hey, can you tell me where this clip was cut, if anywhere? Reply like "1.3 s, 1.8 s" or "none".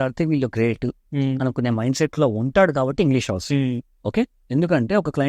none

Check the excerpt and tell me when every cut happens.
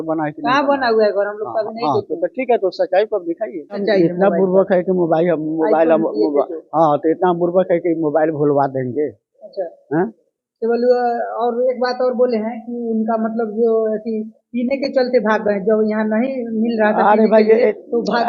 3.8 s

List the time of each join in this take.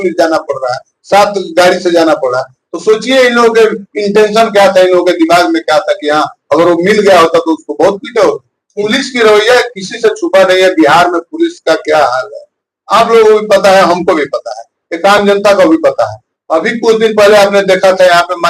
8.8 s

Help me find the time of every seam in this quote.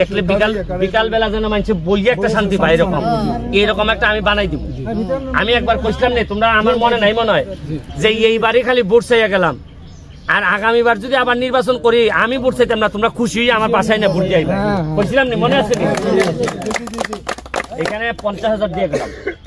none

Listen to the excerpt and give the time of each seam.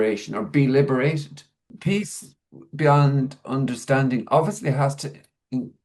1.7 s

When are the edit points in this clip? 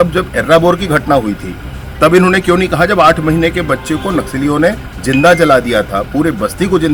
none

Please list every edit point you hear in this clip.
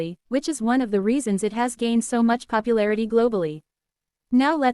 1.9 s

